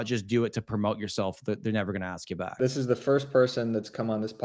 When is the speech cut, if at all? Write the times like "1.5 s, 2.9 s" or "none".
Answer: 2.6 s